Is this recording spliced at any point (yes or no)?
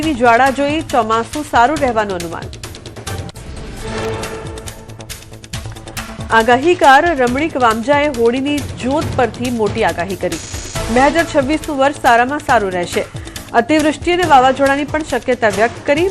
yes